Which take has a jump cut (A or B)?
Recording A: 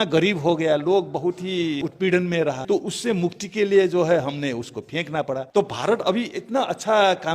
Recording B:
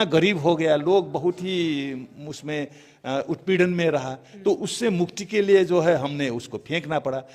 A